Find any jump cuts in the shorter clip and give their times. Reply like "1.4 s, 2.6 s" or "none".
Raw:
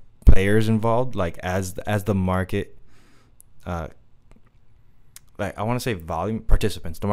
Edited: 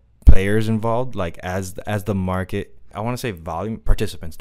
2.9 s